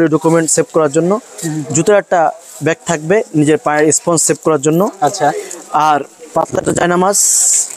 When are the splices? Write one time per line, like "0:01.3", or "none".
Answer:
none

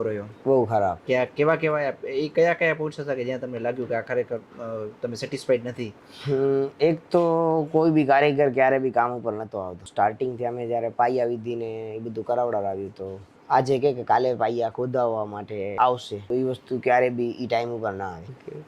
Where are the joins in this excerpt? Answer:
none

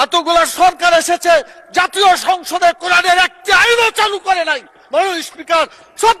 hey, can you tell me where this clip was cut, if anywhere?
none

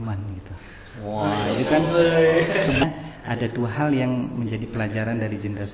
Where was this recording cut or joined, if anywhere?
0:02.8

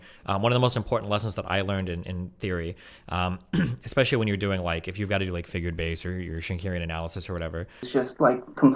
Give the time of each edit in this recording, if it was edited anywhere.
0:07.9

